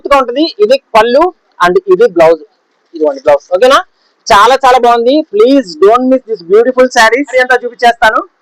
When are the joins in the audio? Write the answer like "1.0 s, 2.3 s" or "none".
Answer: 7.3 s